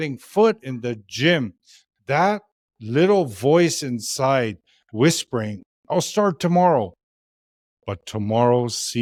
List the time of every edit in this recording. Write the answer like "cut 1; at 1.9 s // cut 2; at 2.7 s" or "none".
none